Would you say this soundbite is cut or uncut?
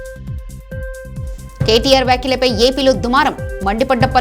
uncut